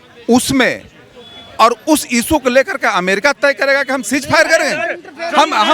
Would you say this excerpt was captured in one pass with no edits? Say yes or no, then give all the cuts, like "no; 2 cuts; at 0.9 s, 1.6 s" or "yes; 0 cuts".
yes; 0 cuts